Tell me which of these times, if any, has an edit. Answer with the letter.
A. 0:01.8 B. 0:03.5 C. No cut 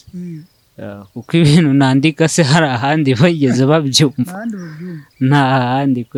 C